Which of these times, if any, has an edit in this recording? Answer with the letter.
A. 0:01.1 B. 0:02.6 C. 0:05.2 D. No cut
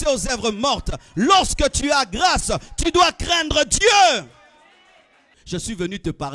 C